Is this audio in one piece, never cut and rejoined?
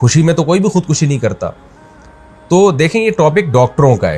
yes; 0 cuts

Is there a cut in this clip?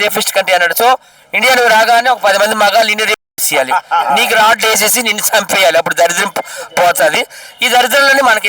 no; 0 cuts

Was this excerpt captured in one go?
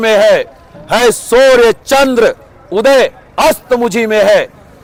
yes; 0 cuts

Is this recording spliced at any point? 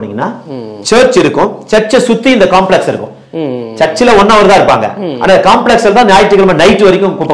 no; 0 cuts

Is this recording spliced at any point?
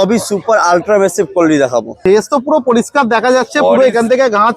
yes; 1 cut; at 1.9 s

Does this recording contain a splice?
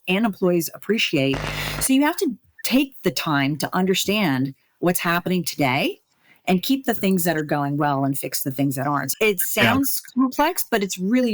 yes; 1 cut; at 9.1 s

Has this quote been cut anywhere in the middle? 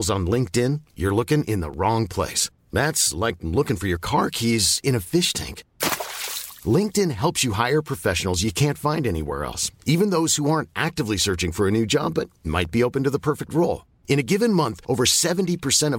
no; 0 cuts

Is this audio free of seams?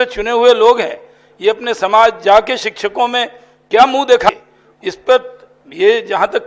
yes; 0 cuts

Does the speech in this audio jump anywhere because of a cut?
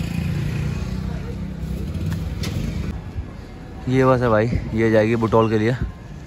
yes; 1 cut; at 2.9 s

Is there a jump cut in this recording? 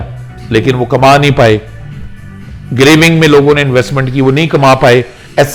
no; 0 cuts

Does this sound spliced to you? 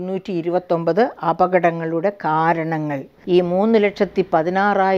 yes; 1 cut; at 3.1 s

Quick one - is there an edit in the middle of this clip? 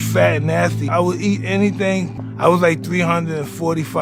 no; 0 cuts

